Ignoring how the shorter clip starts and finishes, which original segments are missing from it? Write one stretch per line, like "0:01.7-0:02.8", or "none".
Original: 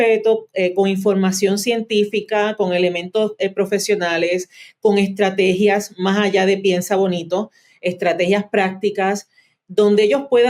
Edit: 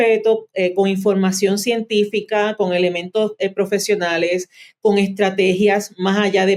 none